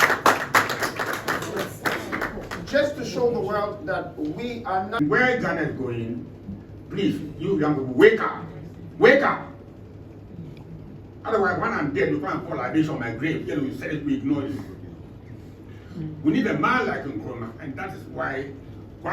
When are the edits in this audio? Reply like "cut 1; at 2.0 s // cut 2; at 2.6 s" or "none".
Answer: cut 1; at 5.0 s